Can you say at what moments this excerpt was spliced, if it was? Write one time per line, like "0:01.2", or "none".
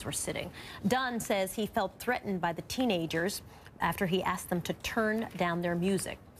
none